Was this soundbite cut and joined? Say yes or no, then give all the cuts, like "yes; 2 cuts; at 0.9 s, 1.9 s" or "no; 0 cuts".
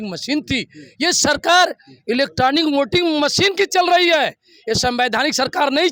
no; 0 cuts